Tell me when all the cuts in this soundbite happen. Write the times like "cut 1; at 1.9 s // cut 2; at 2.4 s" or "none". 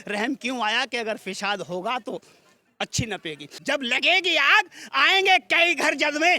cut 1; at 3.5 s